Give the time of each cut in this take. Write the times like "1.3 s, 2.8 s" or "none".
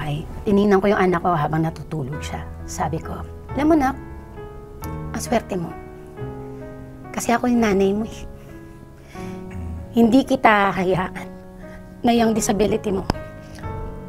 none